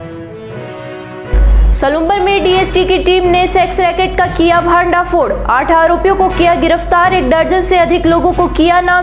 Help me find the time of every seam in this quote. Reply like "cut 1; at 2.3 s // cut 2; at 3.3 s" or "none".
none